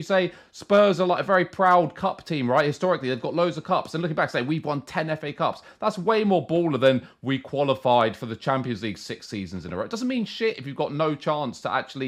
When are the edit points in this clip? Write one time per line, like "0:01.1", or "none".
none